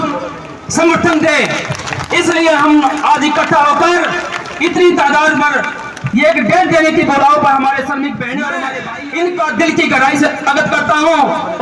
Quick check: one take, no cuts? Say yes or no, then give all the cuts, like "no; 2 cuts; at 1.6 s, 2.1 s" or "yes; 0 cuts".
no; 1 cut; at 8.7 s